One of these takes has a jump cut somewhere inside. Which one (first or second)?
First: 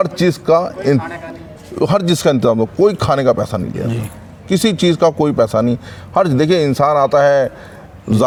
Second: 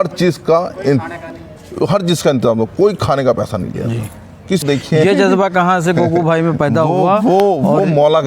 second